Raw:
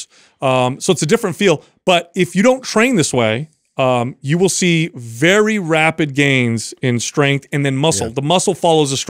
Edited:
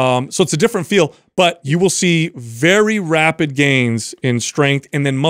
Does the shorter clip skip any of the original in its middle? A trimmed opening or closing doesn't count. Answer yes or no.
yes